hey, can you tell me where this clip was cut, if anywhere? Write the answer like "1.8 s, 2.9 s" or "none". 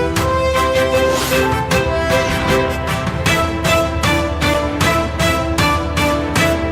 none